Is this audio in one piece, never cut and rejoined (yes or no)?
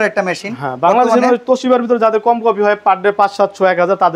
yes